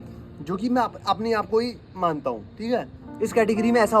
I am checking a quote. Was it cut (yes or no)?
no